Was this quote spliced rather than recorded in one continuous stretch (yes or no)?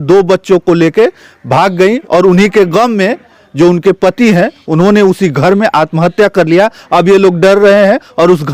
no